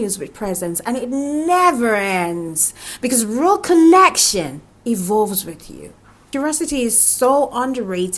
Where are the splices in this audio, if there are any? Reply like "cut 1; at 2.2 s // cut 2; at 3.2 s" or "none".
cut 1; at 6.2 s